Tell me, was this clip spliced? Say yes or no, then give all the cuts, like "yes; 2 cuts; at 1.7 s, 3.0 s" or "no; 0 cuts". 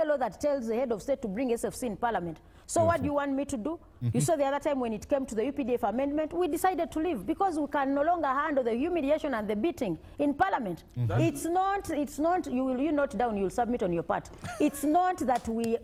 no; 0 cuts